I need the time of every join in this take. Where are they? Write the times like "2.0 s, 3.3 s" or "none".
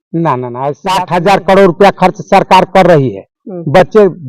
0.9 s